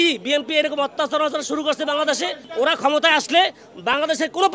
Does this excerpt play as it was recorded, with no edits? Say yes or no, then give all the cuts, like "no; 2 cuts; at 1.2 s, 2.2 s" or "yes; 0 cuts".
yes; 0 cuts